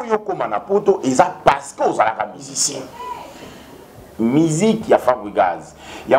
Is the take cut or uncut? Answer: cut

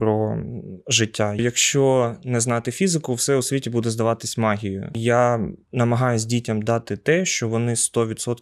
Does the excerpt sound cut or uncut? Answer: cut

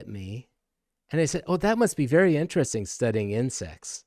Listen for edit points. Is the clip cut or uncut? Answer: uncut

